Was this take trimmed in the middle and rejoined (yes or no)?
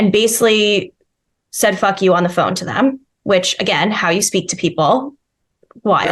no